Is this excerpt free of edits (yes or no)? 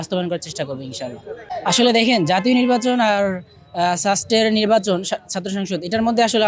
yes